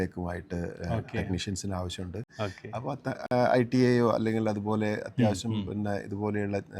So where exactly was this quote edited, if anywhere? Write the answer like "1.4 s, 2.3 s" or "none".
2.3 s

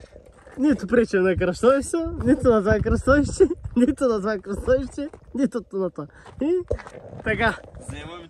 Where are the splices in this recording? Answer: none

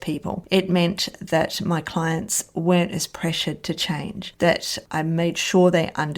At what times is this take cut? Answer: none

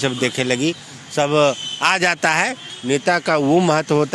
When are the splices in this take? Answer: 2.7 s

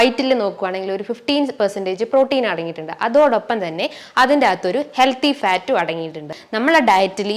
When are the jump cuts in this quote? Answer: 6.4 s

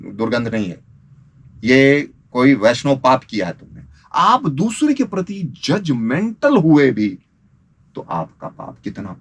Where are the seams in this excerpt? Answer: 4.0 s

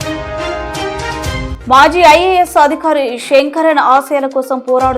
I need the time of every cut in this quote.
1.5 s

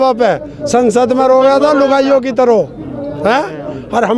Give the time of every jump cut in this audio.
none

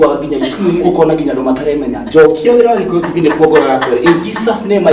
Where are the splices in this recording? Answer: none

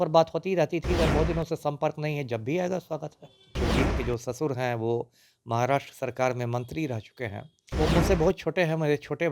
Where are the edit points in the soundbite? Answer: 3.5 s, 7.7 s

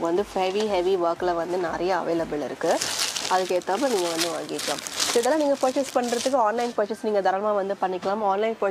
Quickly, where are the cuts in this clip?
none

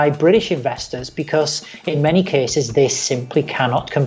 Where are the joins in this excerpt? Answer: none

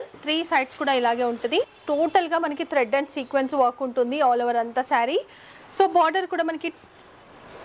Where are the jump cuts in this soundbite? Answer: 1.8 s

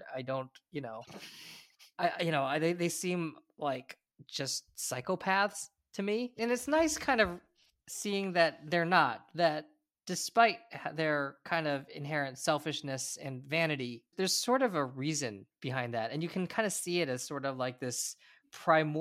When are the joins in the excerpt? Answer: none

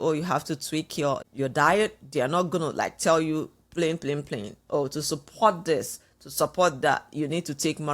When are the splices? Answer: 1.2 s

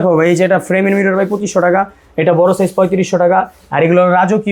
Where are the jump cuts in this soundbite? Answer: none

